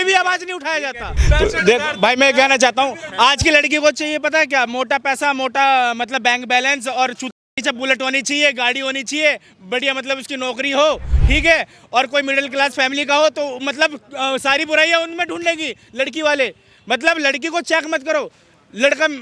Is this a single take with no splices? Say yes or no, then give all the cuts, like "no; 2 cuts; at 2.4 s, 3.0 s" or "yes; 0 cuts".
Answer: yes; 0 cuts